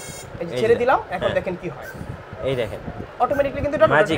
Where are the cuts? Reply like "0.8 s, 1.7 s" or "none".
none